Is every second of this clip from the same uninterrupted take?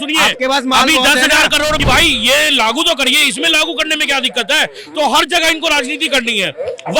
no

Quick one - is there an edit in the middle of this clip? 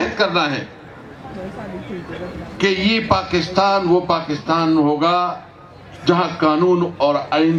no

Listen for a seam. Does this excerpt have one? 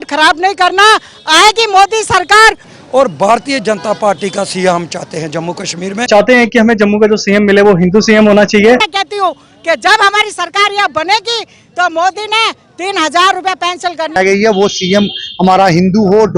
yes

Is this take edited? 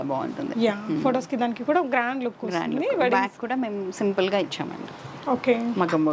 no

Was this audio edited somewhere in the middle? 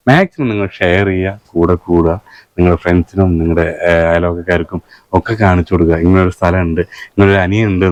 no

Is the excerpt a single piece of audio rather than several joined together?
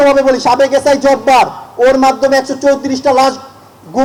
yes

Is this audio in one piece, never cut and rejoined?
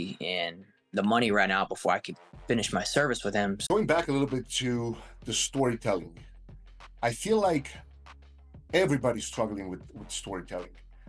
no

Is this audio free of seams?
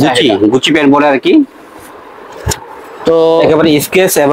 yes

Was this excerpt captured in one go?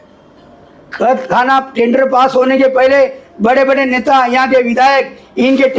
yes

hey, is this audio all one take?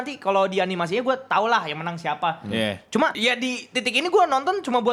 yes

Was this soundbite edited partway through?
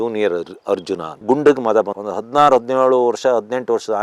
yes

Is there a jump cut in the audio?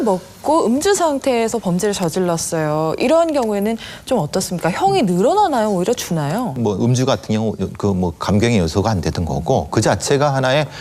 yes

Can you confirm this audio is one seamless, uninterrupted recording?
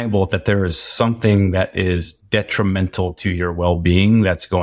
yes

